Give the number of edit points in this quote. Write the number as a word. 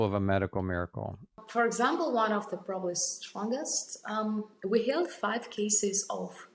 one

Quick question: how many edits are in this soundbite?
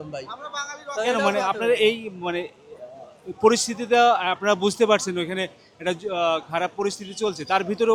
zero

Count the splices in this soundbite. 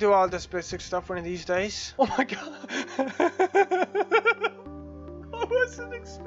one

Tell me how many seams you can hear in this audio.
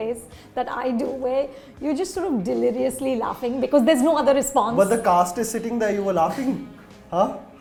zero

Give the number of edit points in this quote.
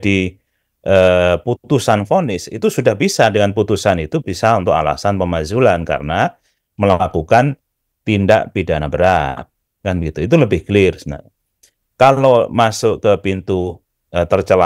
zero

